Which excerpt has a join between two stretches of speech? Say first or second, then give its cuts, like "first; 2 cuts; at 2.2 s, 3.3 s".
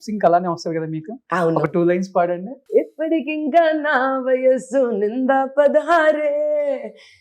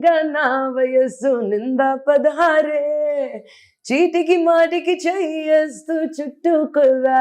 first; 1 cut; at 2.5 s